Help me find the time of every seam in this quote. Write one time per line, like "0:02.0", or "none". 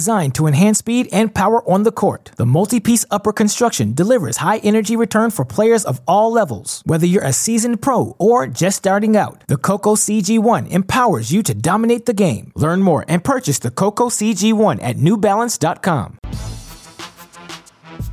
0:16.2